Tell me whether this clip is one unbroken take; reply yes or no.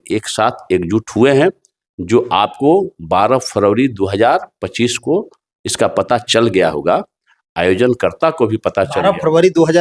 yes